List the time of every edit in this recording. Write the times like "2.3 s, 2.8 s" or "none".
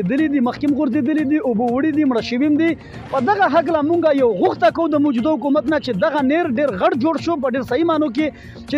none